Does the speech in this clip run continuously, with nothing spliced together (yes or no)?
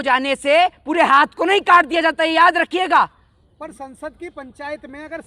yes